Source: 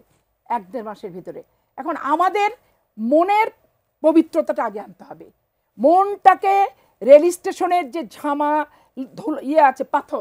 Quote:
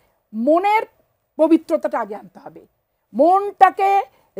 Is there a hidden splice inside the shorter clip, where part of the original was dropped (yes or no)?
no